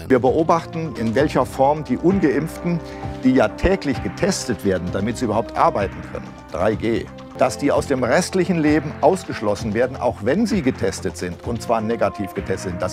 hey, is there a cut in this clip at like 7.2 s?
yes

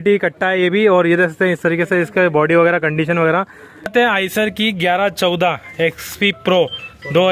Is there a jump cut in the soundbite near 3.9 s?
yes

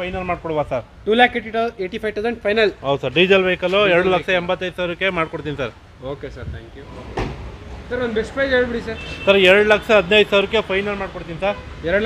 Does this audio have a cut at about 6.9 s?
yes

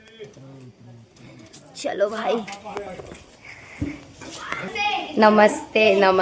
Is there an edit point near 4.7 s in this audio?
yes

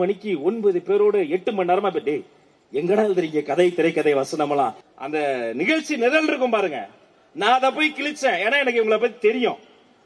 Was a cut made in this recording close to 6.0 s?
no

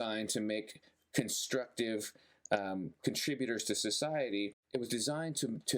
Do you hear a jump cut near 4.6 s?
yes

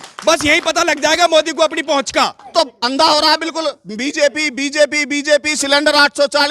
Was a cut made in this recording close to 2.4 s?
yes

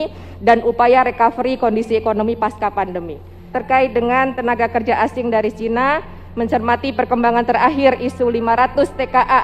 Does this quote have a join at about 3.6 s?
yes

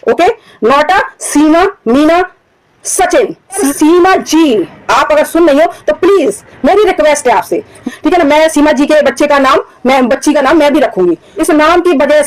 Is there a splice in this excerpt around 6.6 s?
no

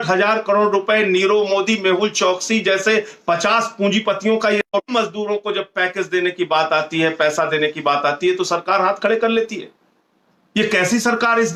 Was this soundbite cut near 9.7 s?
no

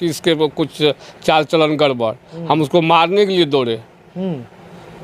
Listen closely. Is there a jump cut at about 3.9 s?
no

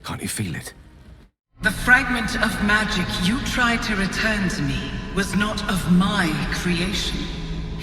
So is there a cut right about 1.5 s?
yes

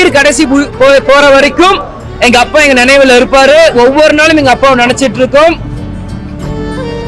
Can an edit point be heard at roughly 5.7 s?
yes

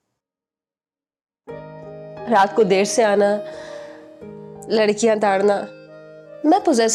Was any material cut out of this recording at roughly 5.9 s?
no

